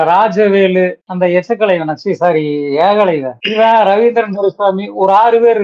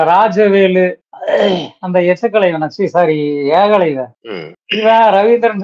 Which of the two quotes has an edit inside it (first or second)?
first